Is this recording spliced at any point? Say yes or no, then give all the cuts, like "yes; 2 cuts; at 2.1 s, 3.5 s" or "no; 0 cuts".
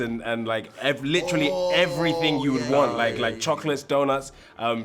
no; 0 cuts